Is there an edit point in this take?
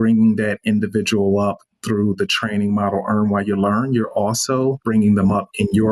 yes; 1 cut; at 4.8 s

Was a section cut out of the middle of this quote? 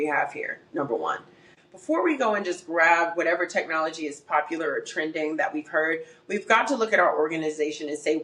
yes; 1 cut; at 1.5 s

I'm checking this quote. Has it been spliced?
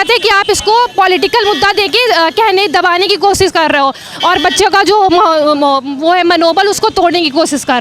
no; 0 cuts

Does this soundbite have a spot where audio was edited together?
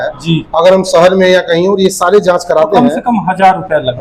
no; 0 cuts

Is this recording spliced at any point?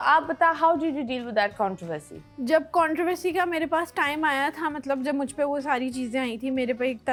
no; 0 cuts

